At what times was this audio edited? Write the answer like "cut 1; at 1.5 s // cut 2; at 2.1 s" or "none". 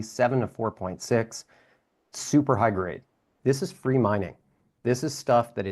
cut 1; at 3.3 s